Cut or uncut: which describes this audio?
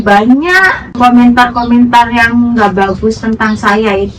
cut